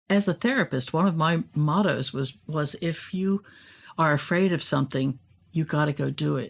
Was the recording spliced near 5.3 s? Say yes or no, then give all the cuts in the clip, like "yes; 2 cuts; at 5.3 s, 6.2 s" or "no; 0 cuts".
no; 0 cuts